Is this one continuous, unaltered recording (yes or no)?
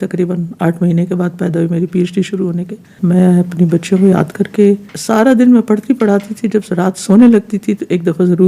no